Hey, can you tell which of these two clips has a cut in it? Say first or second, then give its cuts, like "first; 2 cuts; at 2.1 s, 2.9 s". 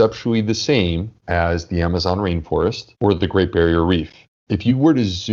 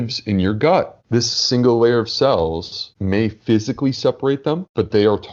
first; 1 cut; at 4.2 s